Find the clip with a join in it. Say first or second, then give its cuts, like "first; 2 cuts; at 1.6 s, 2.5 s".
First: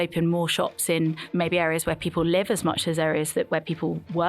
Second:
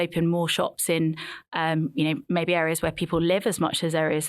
first; 1 cut; at 1.3 s